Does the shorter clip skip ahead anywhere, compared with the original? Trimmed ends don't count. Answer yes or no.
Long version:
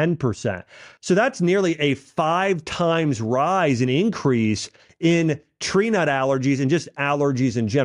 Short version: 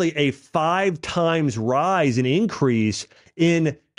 no